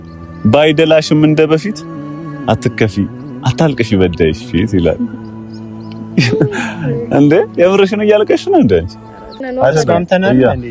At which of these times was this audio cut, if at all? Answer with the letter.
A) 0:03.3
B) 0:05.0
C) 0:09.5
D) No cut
C